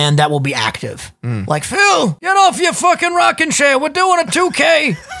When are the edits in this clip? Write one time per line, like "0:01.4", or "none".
0:02.2